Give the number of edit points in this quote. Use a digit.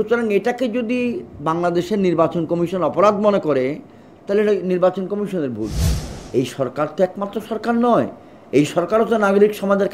1